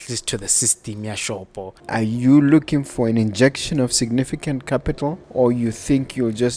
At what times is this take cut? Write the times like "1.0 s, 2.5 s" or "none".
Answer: 1.8 s, 5.2 s